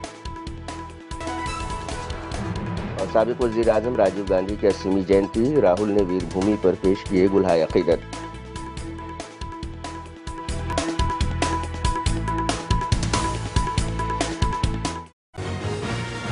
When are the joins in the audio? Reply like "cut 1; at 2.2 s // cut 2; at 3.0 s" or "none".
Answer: cut 1; at 15.4 s